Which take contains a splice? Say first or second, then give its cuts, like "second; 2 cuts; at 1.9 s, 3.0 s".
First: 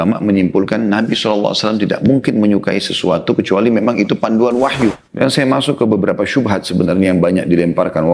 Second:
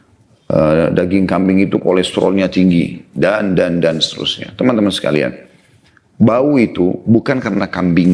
first; 1 cut; at 5.1 s